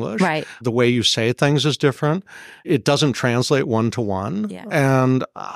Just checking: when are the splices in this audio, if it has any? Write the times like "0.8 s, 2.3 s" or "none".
2.6 s